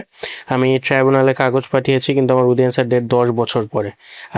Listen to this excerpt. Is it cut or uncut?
uncut